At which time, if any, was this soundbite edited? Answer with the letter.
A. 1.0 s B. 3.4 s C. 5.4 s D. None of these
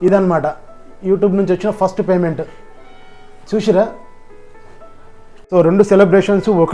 C